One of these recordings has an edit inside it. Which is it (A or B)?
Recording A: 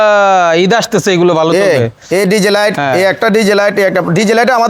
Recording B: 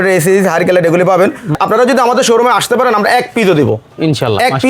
B